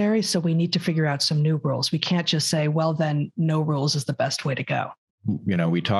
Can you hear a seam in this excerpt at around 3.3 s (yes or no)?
no